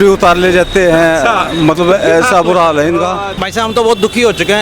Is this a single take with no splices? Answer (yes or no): no